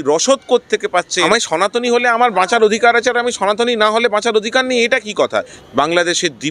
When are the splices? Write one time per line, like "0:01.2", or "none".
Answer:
0:01.2
0:05.6